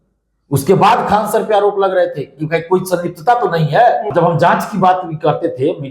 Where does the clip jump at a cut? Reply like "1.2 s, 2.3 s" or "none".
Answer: 4.1 s